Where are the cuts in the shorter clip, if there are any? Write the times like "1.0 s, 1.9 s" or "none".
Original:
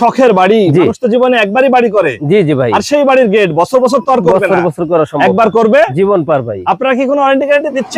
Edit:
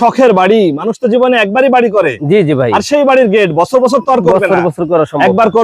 none